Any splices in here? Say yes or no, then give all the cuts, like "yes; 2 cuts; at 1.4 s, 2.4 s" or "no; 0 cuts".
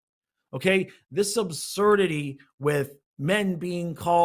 yes; 1 cut; at 3.0 s